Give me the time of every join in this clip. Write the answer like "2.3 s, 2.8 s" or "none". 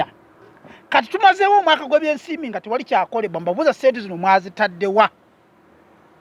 none